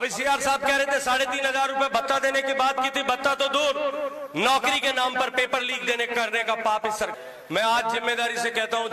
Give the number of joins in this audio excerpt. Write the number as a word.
one